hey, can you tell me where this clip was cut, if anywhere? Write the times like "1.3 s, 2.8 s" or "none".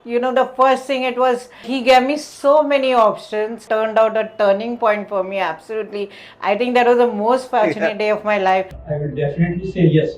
1.7 s, 3.6 s, 8.8 s